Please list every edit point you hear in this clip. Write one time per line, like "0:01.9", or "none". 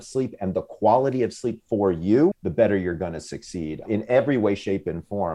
0:02.4
0:03.8